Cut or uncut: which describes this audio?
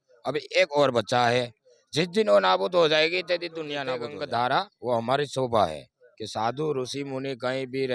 cut